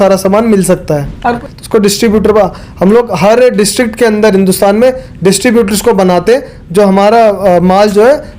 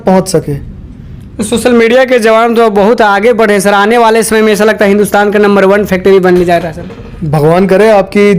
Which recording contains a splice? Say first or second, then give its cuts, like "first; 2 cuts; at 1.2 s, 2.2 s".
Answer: first; 1 cut; at 1.4 s